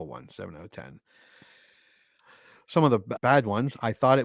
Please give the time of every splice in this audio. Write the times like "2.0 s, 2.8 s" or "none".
3.1 s

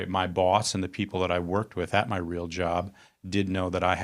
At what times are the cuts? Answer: none

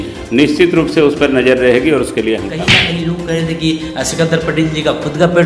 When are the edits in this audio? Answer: 2.8 s

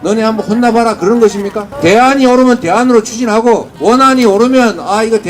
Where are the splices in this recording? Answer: 1.6 s, 3.7 s

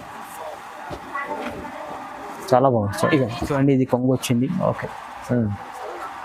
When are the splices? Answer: 3.5 s

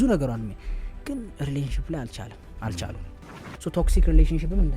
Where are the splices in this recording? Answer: 3.4 s

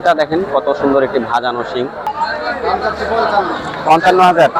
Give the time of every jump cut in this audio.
2.1 s

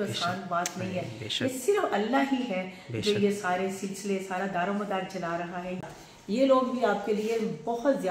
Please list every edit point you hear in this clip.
5.8 s

